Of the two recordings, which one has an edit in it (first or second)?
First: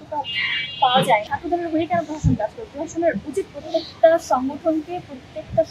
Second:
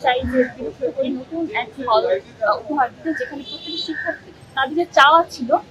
first